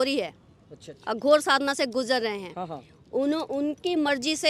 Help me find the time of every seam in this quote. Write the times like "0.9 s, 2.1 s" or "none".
none